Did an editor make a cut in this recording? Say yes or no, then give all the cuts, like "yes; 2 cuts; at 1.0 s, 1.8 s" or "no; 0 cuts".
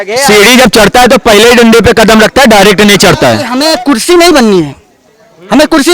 yes; 1 cut; at 3.5 s